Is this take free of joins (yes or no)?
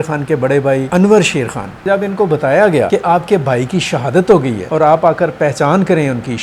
no